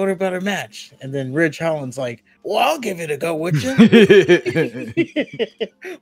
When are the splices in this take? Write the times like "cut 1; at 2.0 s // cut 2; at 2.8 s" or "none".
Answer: cut 1; at 2.3 s